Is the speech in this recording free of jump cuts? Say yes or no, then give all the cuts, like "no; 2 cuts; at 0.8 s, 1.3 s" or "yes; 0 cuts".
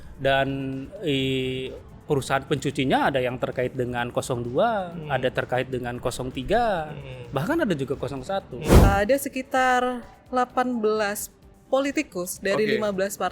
no; 1 cut; at 8.6 s